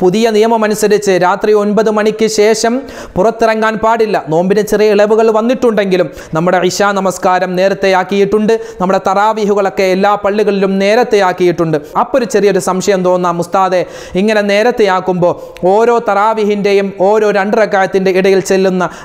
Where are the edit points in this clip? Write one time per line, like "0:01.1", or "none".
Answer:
0:06.2